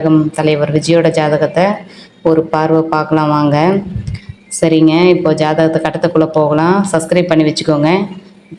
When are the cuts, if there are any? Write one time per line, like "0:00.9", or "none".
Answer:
none

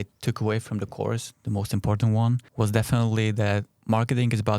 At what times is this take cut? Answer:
0:02.5
0:03.7

